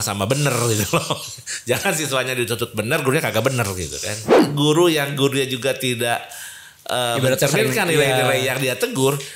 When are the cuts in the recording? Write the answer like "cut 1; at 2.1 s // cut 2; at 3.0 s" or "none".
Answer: cut 1; at 4.4 s